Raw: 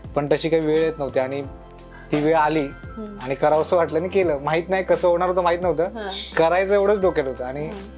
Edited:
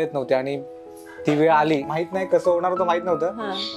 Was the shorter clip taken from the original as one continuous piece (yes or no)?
no